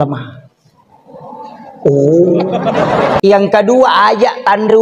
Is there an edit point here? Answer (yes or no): yes